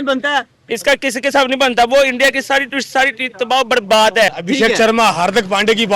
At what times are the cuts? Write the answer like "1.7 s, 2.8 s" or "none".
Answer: 4.3 s